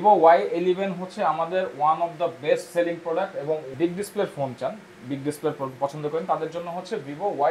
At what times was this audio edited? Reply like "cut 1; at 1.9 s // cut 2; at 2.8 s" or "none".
cut 1; at 3.7 s